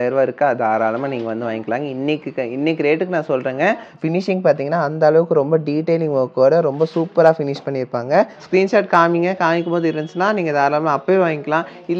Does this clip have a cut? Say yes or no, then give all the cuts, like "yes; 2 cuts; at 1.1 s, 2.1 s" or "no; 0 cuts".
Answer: yes; 2 cuts; at 3.9 s, 8.4 s